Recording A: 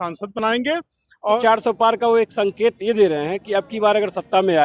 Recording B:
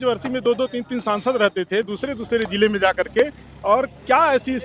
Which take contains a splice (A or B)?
A